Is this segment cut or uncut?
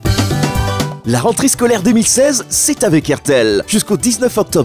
uncut